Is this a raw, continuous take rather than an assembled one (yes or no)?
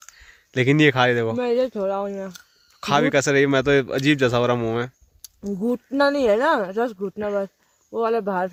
yes